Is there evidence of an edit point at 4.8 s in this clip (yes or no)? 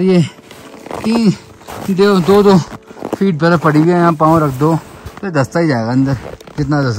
no